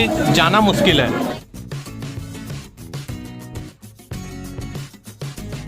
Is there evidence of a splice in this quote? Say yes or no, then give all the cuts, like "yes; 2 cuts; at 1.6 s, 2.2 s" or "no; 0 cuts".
yes; 2 cuts; at 1.3 s, 3.7 s